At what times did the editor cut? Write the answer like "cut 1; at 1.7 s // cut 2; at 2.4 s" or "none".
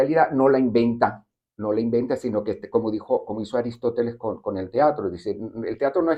none